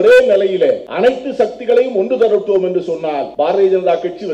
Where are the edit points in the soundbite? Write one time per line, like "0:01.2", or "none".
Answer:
0:00.9
0:03.3